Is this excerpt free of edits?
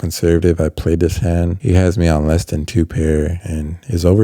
yes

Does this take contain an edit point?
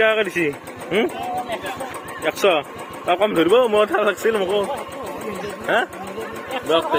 no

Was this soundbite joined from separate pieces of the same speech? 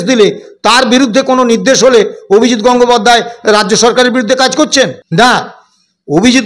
yes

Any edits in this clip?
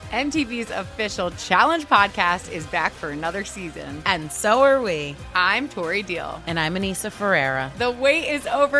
no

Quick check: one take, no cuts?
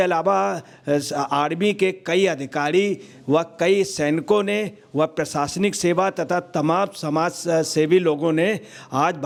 yes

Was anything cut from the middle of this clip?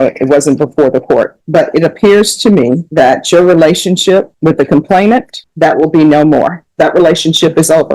yes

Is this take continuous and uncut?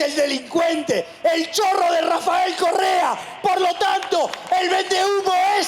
yes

